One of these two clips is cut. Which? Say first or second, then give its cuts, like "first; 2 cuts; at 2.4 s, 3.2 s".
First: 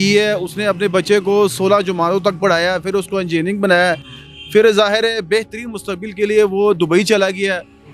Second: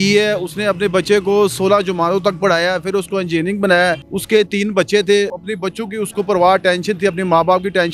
second; 2 cuts; at 4.1 s, 5.5 s